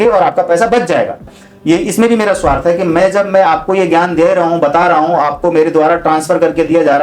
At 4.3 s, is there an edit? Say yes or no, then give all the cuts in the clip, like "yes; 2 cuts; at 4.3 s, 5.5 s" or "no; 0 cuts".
no; 1 cut; at 1.3 s